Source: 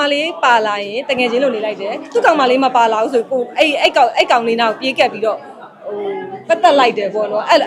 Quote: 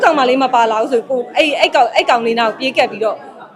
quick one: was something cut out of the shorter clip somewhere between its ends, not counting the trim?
no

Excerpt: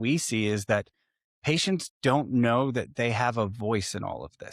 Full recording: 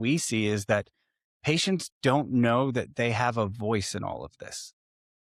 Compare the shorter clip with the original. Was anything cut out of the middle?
no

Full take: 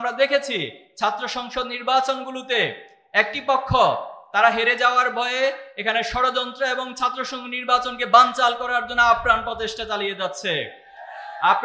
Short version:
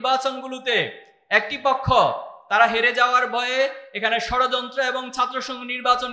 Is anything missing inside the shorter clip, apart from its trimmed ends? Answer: no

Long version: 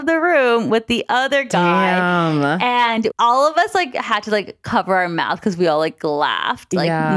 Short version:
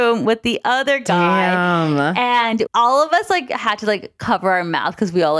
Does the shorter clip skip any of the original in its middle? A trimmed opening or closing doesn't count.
no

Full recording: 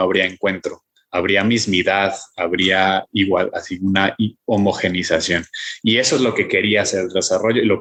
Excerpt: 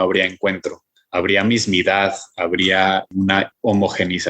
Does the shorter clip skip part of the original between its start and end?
yes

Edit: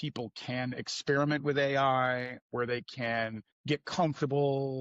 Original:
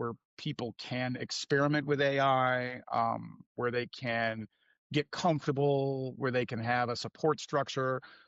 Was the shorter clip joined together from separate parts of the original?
yes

